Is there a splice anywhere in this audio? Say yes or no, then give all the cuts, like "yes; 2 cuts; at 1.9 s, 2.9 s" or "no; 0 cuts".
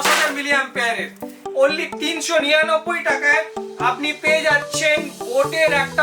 yes; 1 cut; at 1.4 s